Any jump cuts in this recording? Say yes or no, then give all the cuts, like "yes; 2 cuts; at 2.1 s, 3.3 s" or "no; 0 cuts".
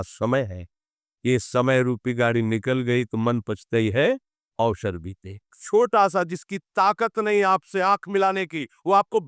yes; 1 cut; at 5.6 s